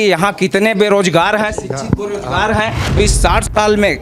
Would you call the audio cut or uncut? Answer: cut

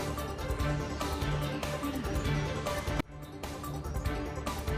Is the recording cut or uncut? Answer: uncut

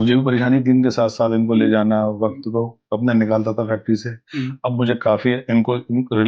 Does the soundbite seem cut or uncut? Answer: uncut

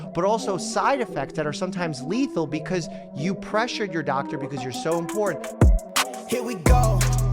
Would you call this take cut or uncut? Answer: cut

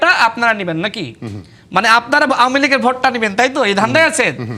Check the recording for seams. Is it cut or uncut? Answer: uncut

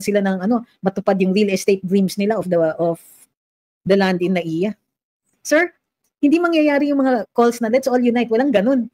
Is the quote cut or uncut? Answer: cut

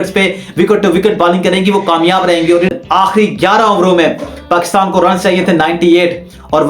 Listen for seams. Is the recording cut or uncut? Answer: cut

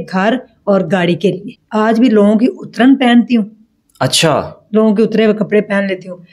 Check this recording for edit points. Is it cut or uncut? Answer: cut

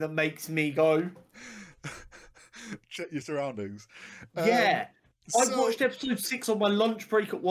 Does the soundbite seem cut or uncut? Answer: uncut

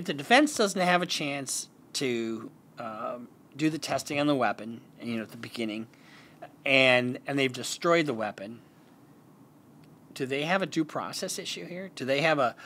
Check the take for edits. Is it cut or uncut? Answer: uncut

